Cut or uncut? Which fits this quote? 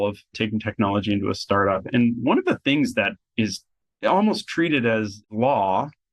cut